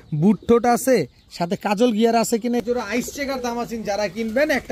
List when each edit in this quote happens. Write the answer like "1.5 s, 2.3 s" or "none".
2.6 s